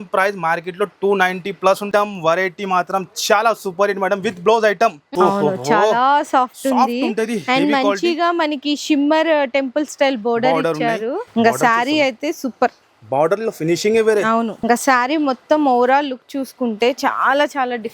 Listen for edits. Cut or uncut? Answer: cut